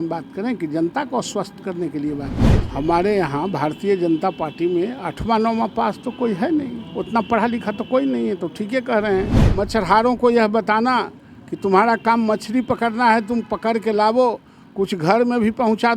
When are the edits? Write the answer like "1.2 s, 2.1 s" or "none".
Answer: 2.5 s, 9.4 s